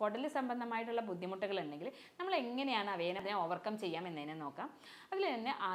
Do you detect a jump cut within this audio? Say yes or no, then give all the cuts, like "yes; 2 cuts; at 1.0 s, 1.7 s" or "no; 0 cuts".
no; 0 cuts